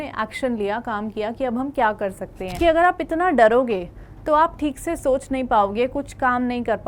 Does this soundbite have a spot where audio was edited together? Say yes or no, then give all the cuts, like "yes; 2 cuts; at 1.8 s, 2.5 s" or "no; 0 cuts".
yes; 1 cut; at 2.6 s